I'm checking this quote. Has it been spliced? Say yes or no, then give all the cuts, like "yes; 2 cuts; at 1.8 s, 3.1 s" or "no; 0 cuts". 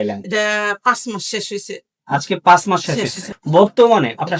yes; 1 cut; at 3.3 s